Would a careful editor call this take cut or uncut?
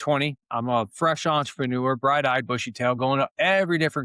uncut